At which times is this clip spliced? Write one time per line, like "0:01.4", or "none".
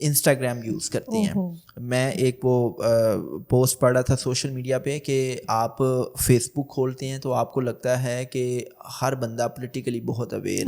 none